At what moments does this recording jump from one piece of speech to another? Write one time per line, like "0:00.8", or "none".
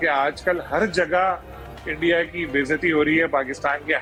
none